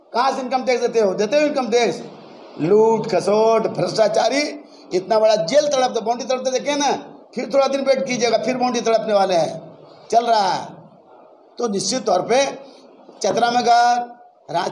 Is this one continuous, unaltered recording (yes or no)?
yes